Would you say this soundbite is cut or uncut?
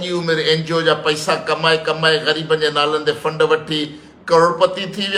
uncut